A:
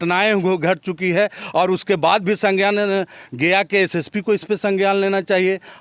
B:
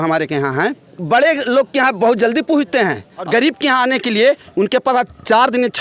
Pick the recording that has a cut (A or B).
B